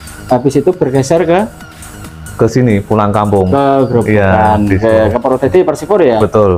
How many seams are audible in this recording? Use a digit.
0